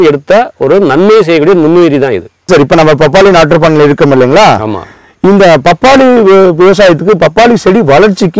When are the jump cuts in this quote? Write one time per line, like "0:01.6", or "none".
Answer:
0:02.4